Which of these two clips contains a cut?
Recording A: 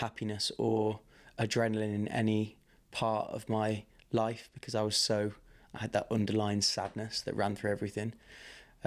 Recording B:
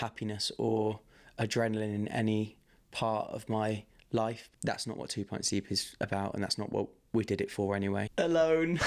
B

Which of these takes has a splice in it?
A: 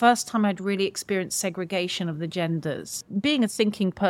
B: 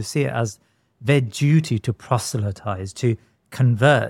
A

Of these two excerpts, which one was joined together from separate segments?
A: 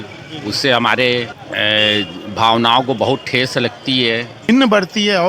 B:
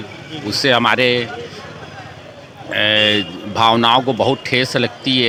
A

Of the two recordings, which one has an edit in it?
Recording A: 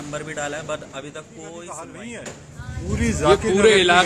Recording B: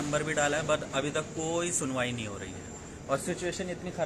A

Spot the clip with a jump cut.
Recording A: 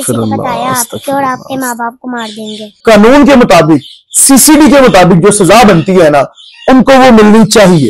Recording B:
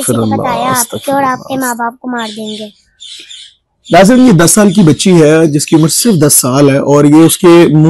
A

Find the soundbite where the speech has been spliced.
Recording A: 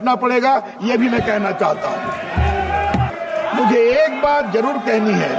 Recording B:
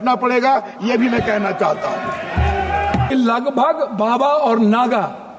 B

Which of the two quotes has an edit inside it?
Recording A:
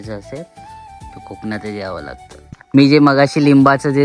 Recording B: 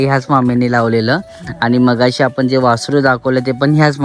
A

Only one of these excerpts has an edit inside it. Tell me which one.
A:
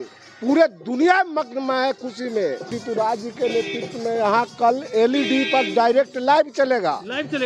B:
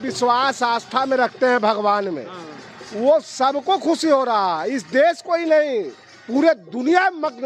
A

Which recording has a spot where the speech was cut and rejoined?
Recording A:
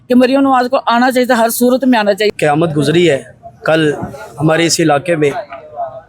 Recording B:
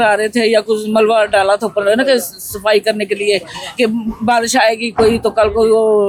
A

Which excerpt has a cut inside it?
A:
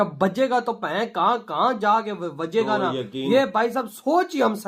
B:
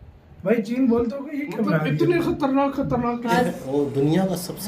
B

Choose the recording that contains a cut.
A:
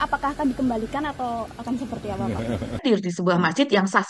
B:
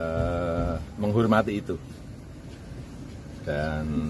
A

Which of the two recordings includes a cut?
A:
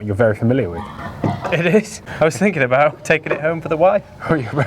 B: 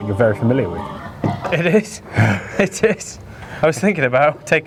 A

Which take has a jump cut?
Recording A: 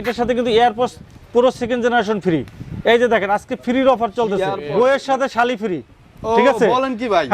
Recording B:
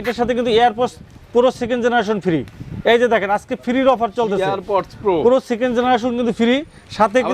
A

